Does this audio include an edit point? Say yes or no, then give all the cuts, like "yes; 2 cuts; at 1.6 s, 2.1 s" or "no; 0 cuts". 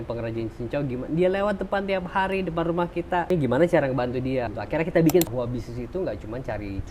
yes; 3 cuts; at 3.3 s, 4.5 s, 5.3 s